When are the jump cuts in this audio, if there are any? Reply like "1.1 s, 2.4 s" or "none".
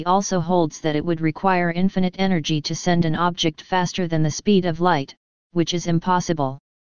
3.7 s